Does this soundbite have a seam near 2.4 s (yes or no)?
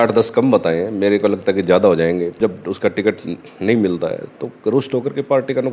yes